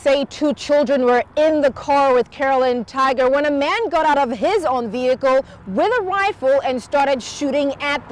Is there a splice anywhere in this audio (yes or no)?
no